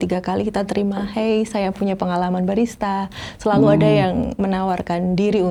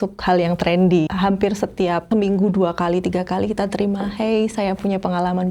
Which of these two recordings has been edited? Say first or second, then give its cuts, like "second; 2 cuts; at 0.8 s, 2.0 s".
second; 2 cuts; at 1.1 s, 2.0 s